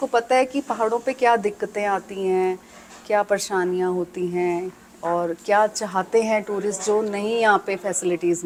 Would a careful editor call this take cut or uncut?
uncut